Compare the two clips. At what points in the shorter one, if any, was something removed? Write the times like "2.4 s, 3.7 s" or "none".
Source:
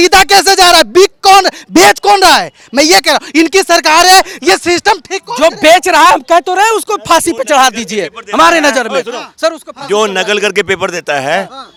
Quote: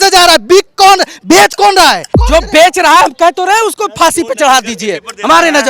2.1 s